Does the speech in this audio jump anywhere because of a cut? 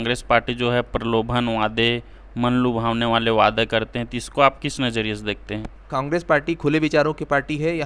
yes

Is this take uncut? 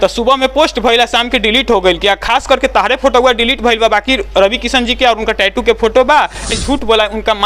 no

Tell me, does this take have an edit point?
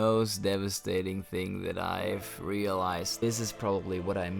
yes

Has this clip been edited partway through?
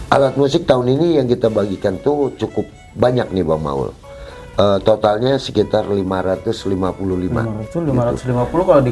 yes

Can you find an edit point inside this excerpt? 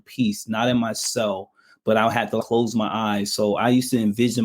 yes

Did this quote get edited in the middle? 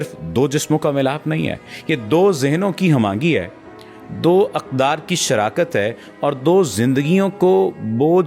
no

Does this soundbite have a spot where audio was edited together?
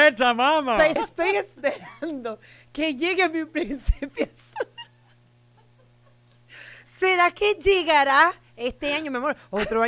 yes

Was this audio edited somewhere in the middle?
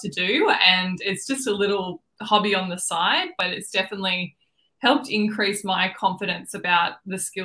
yes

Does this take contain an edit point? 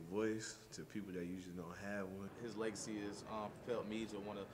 yes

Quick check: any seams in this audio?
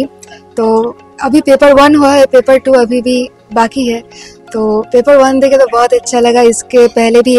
no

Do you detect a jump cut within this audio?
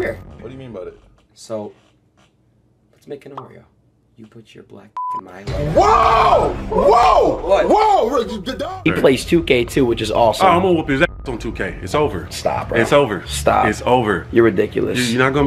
yes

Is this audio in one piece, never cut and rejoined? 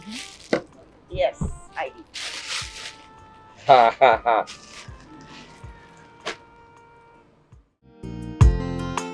no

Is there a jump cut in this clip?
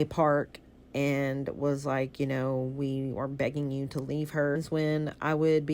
yes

